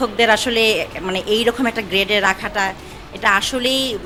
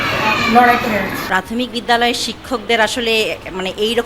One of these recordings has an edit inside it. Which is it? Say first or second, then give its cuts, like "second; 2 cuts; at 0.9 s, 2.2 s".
second; 1 cut; at 1.2 s